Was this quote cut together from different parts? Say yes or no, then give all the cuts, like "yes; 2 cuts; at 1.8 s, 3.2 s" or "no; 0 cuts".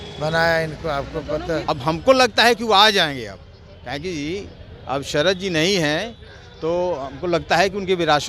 yes; 1 cut; at 1.6 s